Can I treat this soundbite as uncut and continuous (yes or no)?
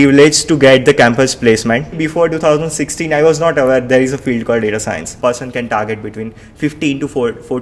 no